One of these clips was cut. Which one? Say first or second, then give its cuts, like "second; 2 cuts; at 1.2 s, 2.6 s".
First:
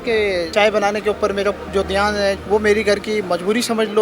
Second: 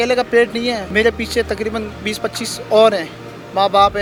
first; 1 cut; at 2.4 s